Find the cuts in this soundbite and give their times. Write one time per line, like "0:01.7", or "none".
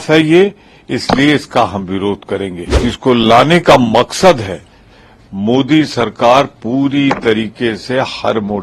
0:02.8

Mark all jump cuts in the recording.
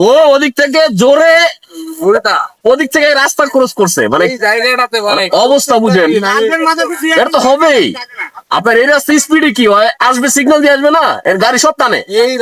none

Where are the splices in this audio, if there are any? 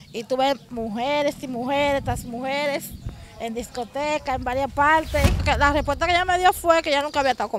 0:05.4

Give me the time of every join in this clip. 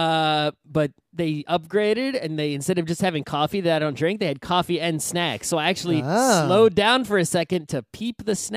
0:05.6

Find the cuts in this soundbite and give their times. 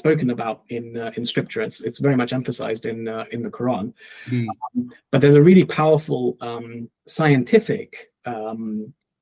none

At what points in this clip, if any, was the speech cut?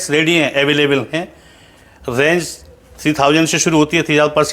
none

